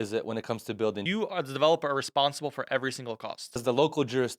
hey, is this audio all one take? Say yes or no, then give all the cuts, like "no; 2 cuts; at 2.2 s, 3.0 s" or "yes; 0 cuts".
no; 2 cuts; at 1.0 s, 3.6 s